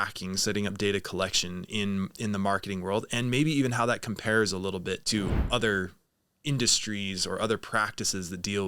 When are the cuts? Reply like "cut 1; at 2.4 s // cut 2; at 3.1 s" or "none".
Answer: cut 1; at 5.0 s